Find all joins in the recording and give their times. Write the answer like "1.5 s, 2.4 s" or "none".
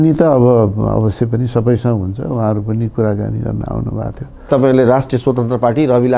4.5 s